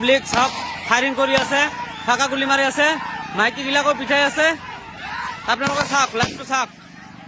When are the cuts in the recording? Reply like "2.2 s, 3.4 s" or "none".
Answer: none